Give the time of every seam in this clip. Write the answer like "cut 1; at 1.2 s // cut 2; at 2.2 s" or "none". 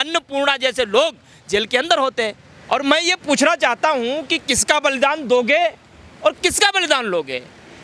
cut 1; at 2.5 s